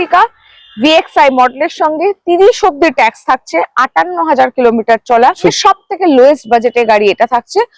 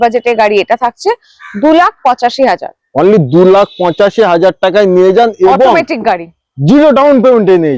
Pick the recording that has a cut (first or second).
first